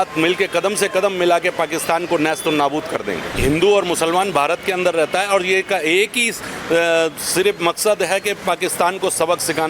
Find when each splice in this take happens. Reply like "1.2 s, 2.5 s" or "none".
3.3 s